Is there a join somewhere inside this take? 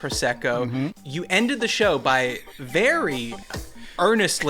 yes; 1 cut; at 0.9 s

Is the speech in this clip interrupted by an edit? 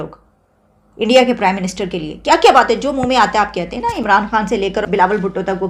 no; 0 cuts

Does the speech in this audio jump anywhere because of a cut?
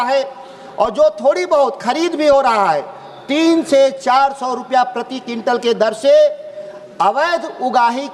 no; 0 cuts

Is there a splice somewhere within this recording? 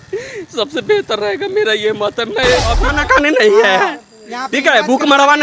yes; 1 cut; at 2.9 s

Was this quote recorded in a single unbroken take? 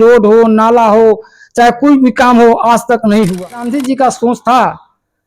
no; 1 cut; at 3.6 s

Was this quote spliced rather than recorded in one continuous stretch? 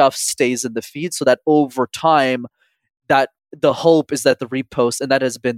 no; 0 cuts

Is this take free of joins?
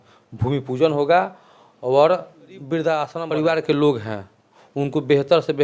no; 1 cut; at 3.1 s

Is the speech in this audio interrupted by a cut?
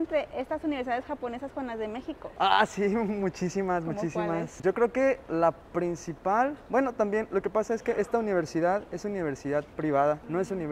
no; 0 cuts

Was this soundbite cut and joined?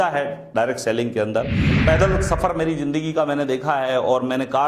yes; 1 cut; at 1.8 s

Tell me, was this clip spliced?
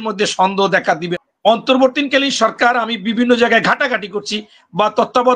yes; 1 cut; at 1.2 s

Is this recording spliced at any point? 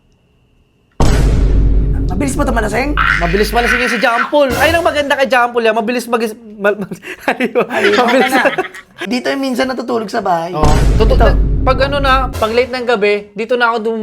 yes; 2 cuts; at 9.0 s, 12.3 s

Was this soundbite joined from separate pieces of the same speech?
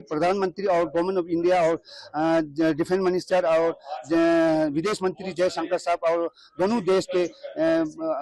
no; 0 cuts

